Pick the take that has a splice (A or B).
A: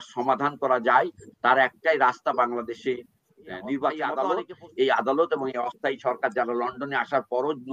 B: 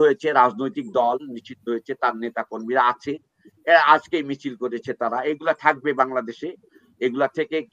A